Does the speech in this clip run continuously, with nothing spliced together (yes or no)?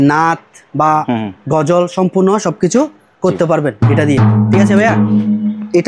yes